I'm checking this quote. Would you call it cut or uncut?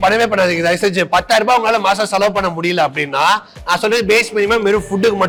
uncut